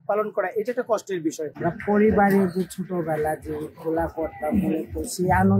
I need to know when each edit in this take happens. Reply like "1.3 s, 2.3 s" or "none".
1.5 s